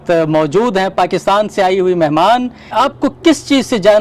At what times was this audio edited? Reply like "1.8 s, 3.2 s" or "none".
2.7 s